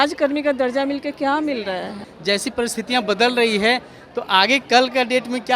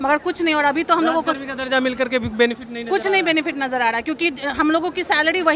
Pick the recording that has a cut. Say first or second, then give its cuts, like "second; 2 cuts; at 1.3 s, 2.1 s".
first; 1 cut; at 2.0 s